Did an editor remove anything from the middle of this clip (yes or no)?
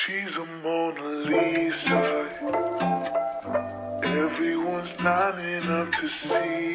no